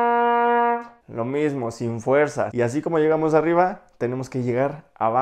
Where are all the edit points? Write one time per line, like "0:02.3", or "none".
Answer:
0:01.0
0:02.5